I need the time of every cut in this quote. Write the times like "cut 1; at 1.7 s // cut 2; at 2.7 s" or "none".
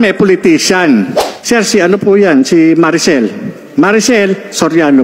cut 1; at 1.3 s

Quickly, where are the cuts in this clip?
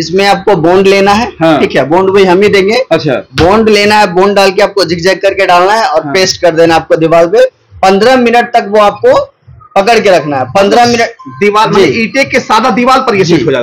none

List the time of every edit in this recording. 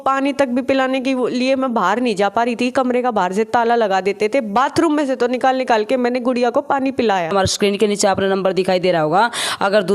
cut 1; at 7.3 s

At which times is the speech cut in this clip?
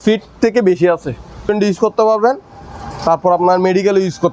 cut 1; at 1.5 s

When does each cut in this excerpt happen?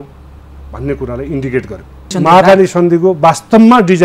cut 1; at 2.1 s

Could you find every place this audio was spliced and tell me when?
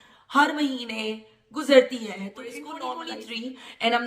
cut 1; at 2.8 s

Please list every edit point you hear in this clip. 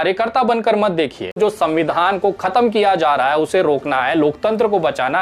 cut 1; at 1.4 s

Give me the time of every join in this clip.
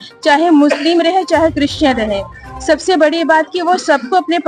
none

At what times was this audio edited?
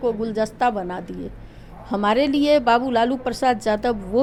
none

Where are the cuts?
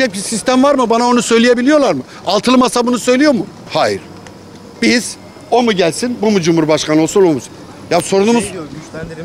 none

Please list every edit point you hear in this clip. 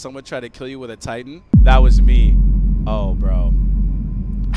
cut 1; at 1.4 s

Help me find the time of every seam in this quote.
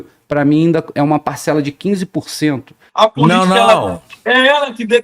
cut 1; at 2.8 s

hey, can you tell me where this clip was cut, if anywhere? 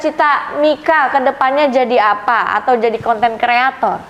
none

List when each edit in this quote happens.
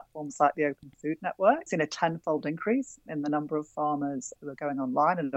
cut 1; at 1.6 s // cut 2; at 4.4 s

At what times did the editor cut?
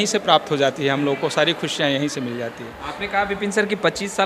none

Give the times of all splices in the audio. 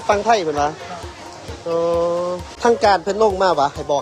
cut 1; at 2.5 s

